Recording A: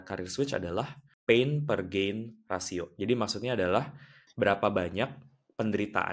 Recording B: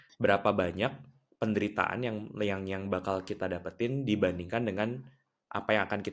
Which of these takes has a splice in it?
A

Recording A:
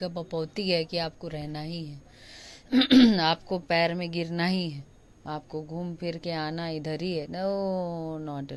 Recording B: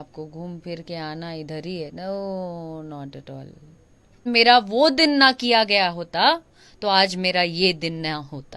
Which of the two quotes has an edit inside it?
B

